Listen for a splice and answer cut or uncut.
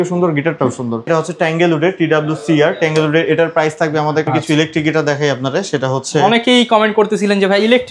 cut